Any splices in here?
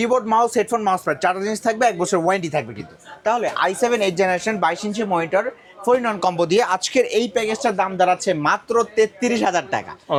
no; 0 cuts

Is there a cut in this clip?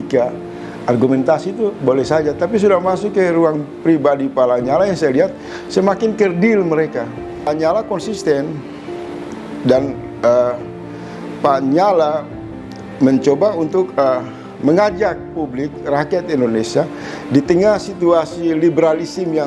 yes; 1 cut; at 7.5 s

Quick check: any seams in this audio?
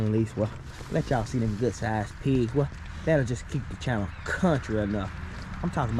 no; 0 cuts

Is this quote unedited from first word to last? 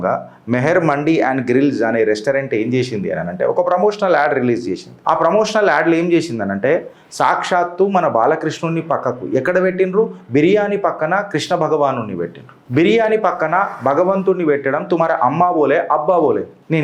yes; 0 cuts

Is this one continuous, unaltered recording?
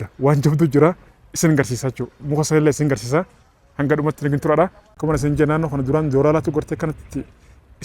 no; 1 cut; at 5.0 s

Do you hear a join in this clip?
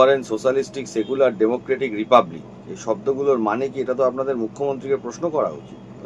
no; 0 cuts

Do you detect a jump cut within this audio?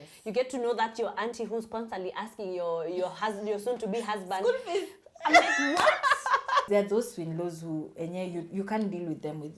yes; 1 cut; at 6.7 s

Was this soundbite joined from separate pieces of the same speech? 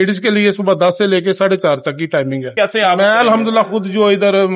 yes; 1 cut; at 2.5 s

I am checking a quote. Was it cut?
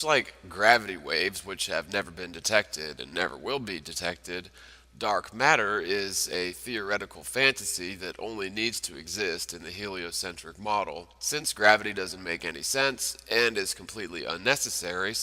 yes; 1 cut; at 3.1 s

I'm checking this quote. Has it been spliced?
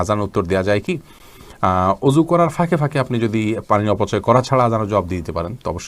no; 0 cuts

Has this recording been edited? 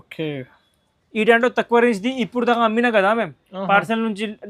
no; 0 cuts

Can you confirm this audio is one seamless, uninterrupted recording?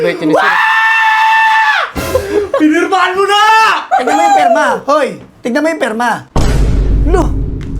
no; 1 cut; at 3.8 s

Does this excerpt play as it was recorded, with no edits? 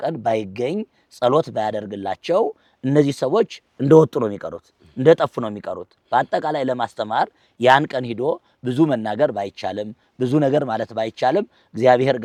yes; 0 cuts

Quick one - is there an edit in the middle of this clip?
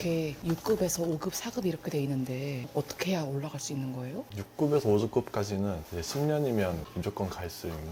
yes; 1 cut; at 4.3 s

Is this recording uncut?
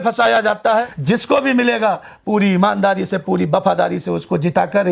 no; 1 cut; at 0.9 s

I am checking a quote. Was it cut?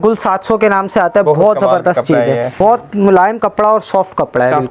yes; 1 cut; at 2.6 s

